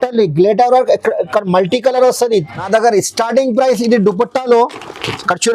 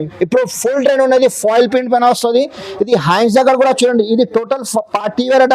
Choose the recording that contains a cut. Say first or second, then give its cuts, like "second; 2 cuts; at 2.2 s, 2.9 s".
first; 1 cut; at 2.6 s